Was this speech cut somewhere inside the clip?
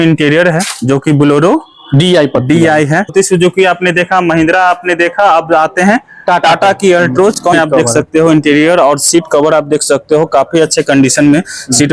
yes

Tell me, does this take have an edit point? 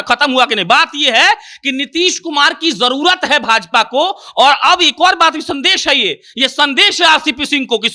no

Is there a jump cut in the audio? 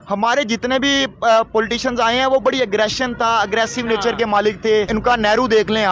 yes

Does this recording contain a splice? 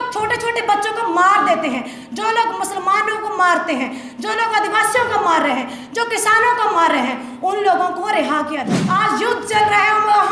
yes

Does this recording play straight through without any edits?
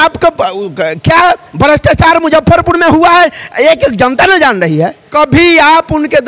no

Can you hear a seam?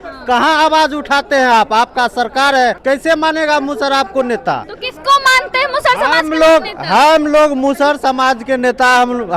yes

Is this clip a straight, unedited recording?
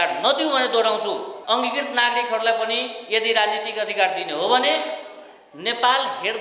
no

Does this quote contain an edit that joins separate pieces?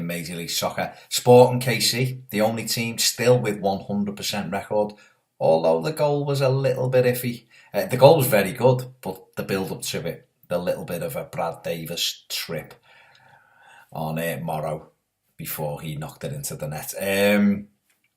yes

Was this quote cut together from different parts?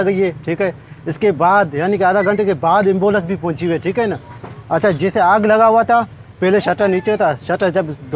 no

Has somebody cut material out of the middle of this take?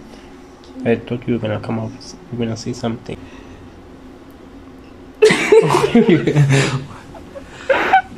yes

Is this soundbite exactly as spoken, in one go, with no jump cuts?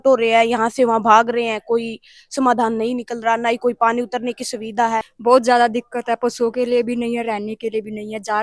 no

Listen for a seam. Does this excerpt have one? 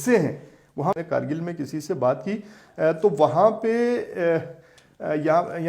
yes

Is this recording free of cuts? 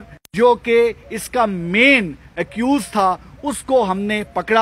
yes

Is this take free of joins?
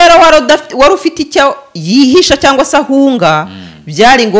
yes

